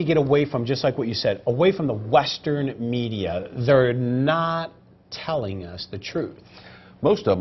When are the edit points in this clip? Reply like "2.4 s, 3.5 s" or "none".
none